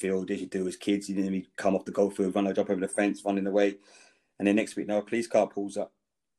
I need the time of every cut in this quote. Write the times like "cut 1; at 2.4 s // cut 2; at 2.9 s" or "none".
none